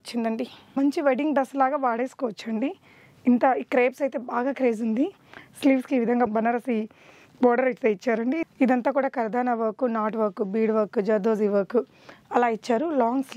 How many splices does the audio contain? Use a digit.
3